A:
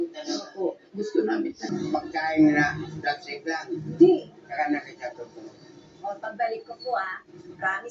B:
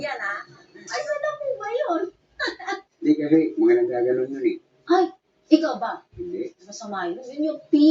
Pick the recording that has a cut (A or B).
A